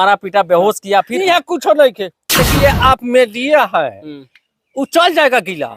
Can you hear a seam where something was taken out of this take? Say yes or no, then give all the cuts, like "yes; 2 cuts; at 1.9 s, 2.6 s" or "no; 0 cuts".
yes; 1 cut; at 2.3 s